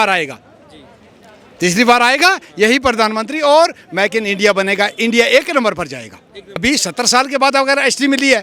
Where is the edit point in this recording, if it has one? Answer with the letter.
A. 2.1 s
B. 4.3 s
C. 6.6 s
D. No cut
C